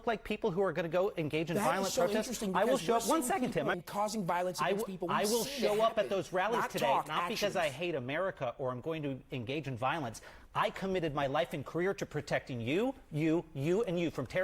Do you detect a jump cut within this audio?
yes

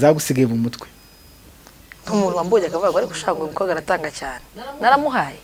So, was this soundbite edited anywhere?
no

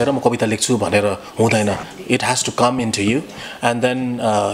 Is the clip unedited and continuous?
yes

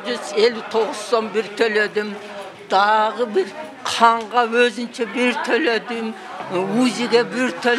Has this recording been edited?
no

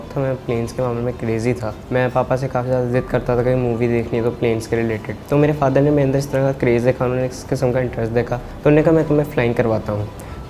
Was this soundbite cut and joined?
yes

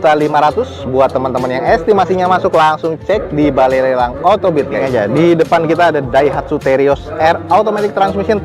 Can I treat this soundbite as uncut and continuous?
yes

